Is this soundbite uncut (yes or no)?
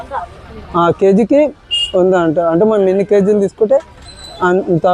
yes